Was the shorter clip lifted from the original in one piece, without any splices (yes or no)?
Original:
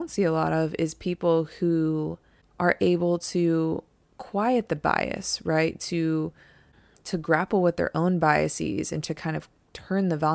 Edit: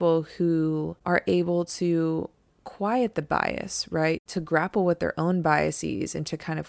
no